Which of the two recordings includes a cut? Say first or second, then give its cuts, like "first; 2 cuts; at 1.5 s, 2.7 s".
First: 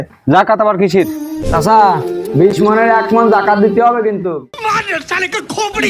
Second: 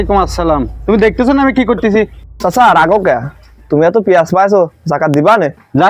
first; 1 cut; at 1.4 s